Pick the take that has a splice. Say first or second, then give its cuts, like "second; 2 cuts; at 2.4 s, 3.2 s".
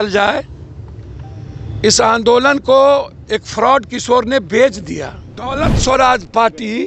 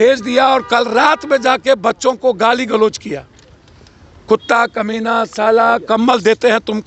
first; 1 cut; at 5.5 s